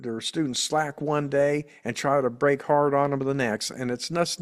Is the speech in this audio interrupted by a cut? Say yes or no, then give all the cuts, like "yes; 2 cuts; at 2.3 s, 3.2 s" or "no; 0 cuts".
no; 0 cuts